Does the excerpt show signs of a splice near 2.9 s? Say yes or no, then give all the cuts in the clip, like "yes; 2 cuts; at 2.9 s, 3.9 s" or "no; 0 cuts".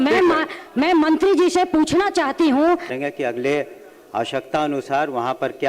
yes; 1 cut; at 2.9 s